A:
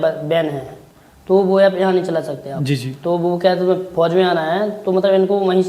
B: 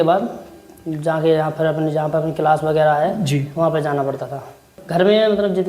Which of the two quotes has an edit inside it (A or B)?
B